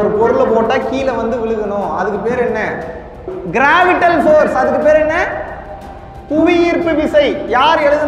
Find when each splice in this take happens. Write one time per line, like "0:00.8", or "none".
none